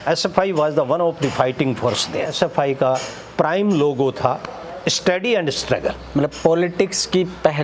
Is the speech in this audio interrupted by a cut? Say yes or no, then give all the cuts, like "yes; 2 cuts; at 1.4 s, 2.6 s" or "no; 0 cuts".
yes; 1 cut; at 2.3 s